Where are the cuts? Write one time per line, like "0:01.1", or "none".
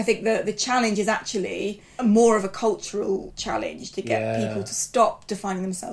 0:01.8
0:03.3